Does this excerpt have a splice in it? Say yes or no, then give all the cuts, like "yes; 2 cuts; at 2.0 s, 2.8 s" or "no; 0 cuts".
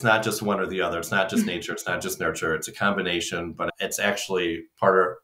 no; 0 cuts